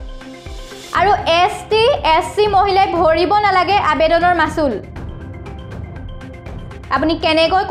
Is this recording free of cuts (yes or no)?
no